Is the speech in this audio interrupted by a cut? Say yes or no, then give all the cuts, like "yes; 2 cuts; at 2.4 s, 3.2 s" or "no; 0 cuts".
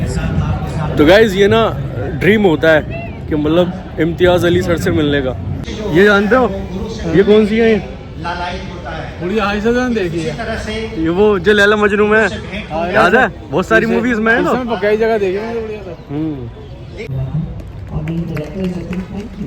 yes; 2 cuts; at 5.6 s, 17.1 s